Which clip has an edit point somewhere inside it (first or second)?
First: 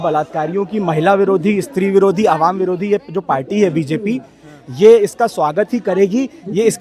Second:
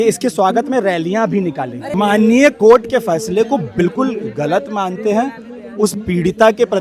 second